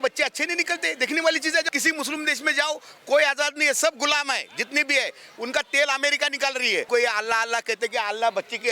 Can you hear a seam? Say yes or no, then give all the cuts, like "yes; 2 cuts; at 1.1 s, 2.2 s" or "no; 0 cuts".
yes; 2 cuts; at 1.7 s, 6.9 s